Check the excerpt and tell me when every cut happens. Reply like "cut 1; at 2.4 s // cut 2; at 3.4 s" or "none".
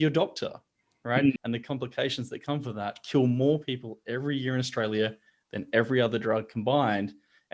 cut 1; at 1.4 s